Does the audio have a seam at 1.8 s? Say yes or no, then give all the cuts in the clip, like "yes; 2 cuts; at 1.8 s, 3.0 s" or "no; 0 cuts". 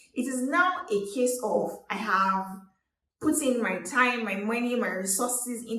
yes; 1 cut; at 1.8 s